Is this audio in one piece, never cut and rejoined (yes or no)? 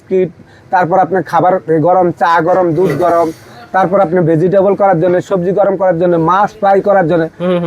yes